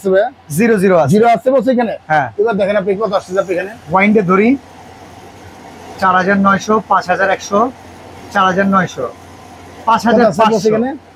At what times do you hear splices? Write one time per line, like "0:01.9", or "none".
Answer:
none